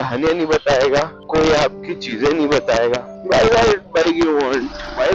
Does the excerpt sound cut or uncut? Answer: cut